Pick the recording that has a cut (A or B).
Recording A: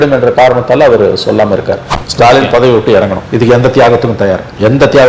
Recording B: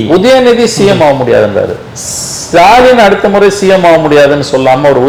A